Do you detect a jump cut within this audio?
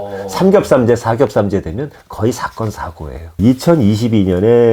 yes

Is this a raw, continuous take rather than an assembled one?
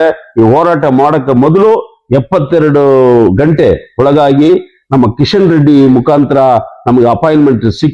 yes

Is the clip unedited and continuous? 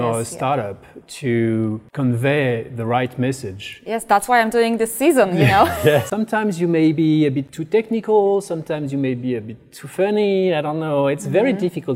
no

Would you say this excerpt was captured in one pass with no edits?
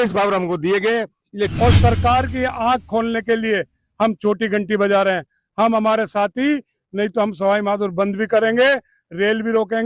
no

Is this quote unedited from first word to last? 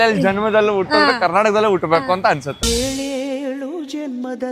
yes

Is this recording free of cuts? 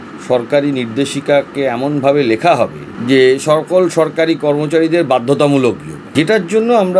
no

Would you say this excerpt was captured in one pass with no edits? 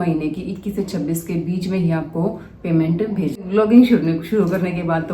no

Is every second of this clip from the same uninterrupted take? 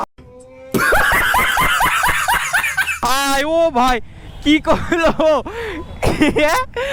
yes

